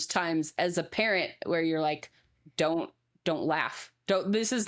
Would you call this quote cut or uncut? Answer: uncut